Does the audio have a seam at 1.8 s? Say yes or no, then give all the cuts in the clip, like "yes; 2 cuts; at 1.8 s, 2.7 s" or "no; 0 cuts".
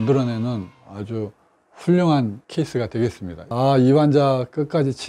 no; 1 cut; at 3.5 s